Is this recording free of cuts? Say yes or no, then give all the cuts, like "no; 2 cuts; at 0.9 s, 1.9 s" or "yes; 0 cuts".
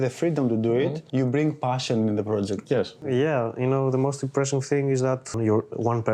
no; 3 cuts; at 1.0 s, 3.0 s, 5.4 s